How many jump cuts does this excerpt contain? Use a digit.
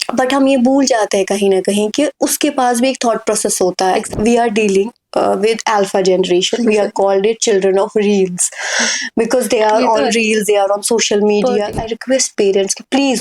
2